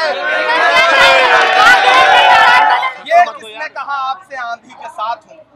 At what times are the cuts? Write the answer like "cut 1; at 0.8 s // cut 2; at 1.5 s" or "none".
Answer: cut 1; at 2.9 s